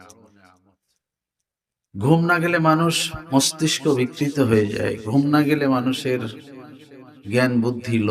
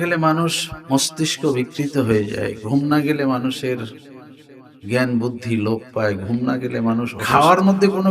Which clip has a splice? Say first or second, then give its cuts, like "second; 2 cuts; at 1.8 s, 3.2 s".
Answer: second; 1 cut; at 7.2 s